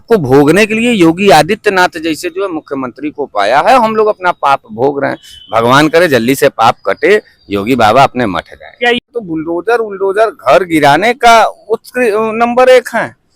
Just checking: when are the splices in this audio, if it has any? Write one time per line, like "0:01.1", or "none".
0:09.1